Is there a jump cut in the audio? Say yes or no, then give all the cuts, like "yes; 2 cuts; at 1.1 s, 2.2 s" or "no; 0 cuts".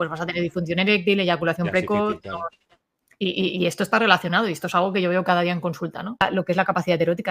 yes; 1 cut; at 6.2 s